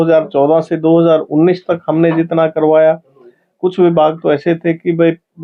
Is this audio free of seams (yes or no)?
yes